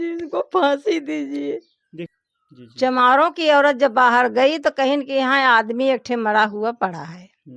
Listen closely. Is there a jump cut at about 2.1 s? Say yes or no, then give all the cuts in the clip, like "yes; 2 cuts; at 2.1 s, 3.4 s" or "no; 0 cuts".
yes; 1 cut; at 2.1 s